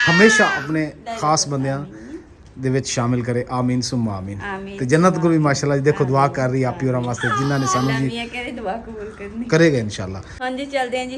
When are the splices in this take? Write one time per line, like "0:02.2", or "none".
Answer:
0:10.3

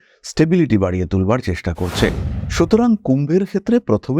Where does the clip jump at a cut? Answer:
0:02.3

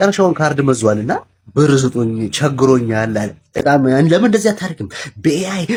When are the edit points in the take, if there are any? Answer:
none

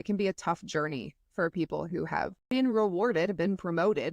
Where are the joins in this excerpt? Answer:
0:02.4

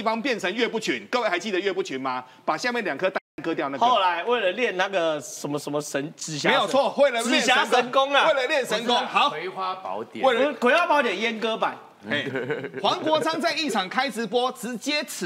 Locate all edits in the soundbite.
none

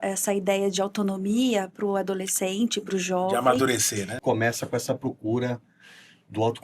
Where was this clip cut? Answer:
0:04.2

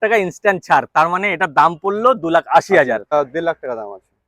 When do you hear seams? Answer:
0:03.1

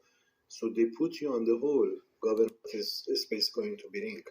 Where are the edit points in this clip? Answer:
0:02.6

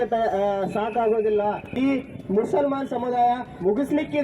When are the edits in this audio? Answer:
0:01.8

